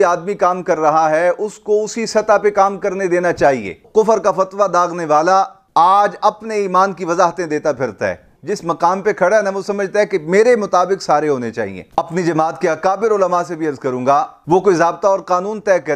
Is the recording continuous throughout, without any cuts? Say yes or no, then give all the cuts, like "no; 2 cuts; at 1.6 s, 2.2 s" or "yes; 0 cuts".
no; 3 cuts; at 3.8 s, 8.3 s, 11.8 s